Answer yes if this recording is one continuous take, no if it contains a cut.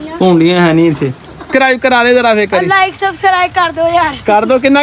no